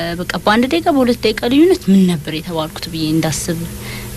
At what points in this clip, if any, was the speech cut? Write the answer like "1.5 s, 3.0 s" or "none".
none